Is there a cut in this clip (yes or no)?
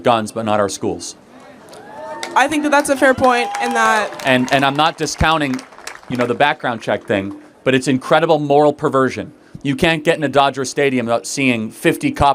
no